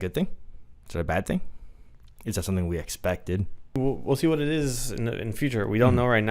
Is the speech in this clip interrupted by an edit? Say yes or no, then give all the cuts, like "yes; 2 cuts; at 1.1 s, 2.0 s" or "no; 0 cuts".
yes; 1 cut; at 3.8 s